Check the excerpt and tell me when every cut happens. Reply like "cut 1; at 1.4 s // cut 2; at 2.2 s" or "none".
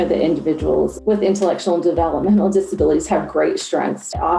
none

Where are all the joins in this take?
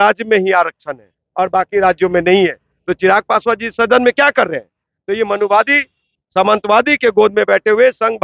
none

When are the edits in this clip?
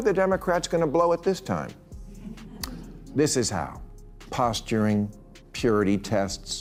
none

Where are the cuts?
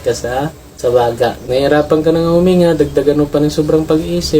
cut 1; at 1.4 s

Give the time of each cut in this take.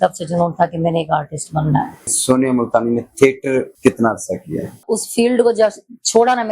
cut 1; at 2.1 s // cut 2; at 3.7 s // cut 3; at 4.8 s

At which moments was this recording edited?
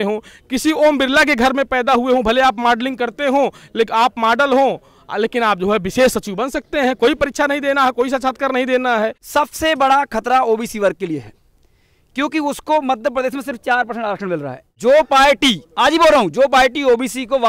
cut 1; at 9.2 s // cut 2; at 14.7 s

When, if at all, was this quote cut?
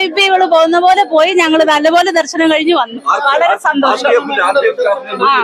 none

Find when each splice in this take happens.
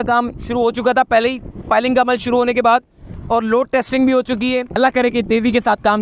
cut 1; at 3.0 s // cut 2; at 4.8 s

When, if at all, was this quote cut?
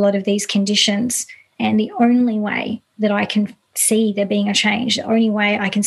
cut 1; at 1.5 s

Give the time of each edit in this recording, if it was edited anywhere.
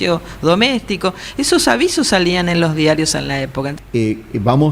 cut 1; at 3.7 s

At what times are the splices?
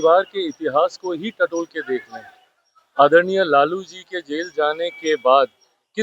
none

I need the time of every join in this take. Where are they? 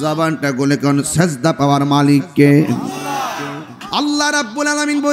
cut 1; at 3.7 s

